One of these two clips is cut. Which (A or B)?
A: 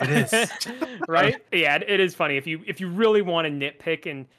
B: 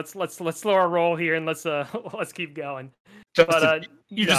A